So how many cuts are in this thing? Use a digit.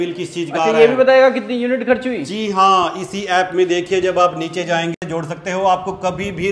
1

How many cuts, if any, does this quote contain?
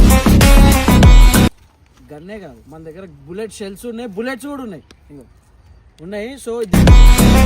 1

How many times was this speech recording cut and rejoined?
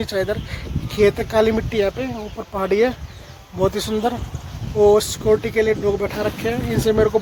0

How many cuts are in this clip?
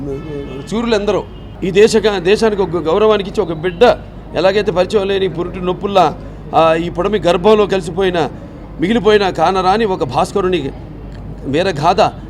1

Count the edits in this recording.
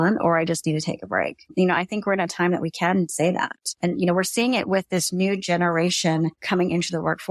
2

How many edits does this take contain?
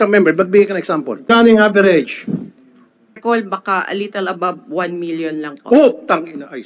2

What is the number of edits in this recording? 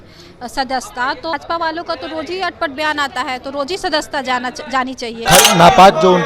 1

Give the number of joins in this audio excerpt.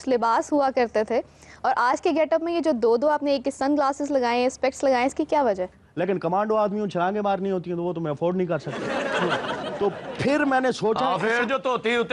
1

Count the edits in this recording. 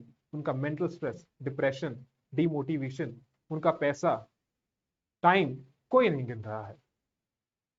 0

